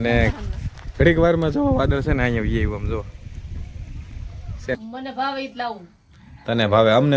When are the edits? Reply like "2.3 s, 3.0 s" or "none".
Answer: 4.8 s